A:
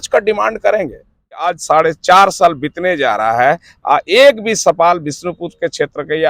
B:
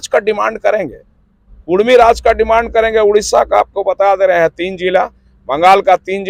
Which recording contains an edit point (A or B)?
A